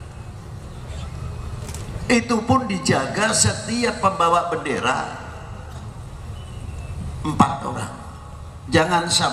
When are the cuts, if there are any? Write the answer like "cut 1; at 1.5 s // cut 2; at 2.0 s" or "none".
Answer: none